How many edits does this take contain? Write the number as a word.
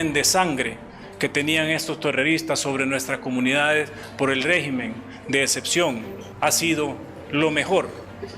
one